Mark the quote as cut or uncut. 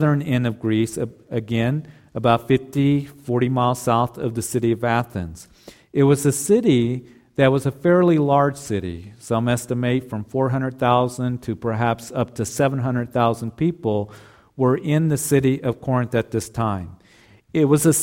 uncut